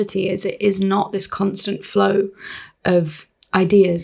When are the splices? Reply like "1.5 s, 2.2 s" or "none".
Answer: none